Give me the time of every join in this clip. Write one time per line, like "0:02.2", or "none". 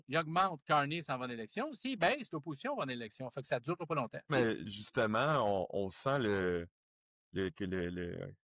0:04.3